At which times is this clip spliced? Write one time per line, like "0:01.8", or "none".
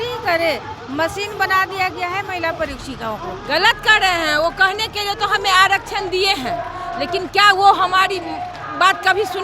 0:03.4